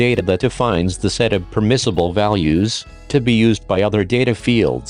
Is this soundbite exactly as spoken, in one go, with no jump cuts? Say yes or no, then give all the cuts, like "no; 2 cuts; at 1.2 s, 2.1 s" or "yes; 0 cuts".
yes; 0 cuts